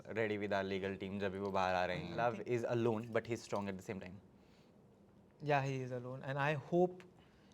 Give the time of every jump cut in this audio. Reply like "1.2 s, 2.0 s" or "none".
2.1 s